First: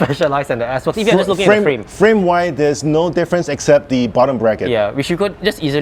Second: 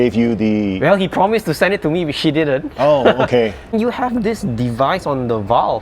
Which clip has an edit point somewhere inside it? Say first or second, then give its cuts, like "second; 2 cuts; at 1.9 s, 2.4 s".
second; 1 cut; at 3.7 s